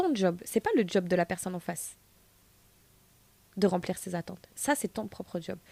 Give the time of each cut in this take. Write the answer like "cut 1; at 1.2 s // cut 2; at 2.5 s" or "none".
none